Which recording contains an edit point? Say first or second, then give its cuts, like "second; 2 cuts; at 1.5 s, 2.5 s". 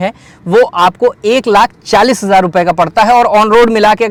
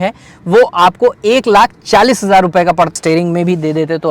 second; 1 cut; at 2.9 s